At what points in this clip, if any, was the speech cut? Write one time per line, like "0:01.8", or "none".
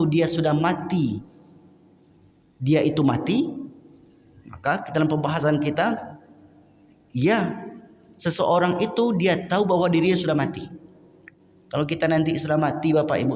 none